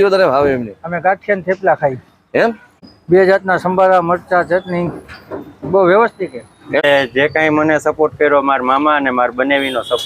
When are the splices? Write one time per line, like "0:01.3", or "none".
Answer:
0:02.8
0:06.8